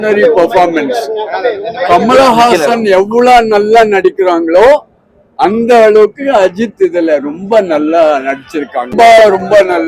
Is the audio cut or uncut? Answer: cut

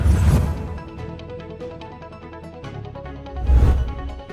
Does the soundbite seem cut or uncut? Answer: cut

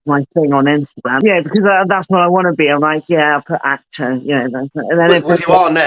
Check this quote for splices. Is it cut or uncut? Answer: cut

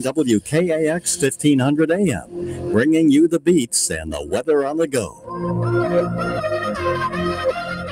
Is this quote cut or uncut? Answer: cut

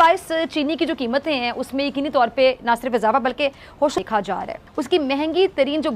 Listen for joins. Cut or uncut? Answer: cut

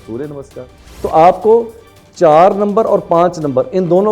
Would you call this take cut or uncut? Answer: cut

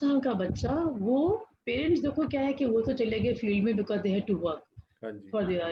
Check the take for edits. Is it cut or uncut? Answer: uncut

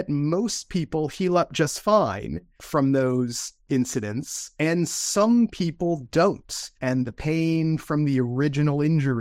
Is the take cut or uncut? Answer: cut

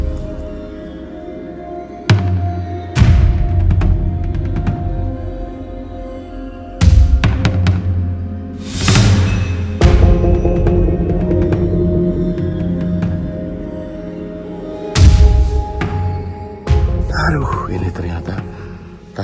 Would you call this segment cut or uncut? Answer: uncut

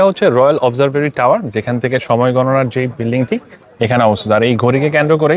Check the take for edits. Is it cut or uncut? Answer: uncut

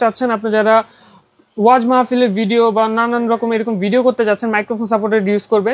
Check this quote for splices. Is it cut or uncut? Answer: uncut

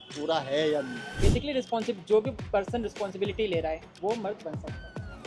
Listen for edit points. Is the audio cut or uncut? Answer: cut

